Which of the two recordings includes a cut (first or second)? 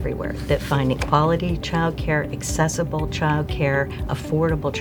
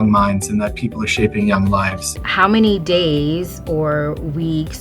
second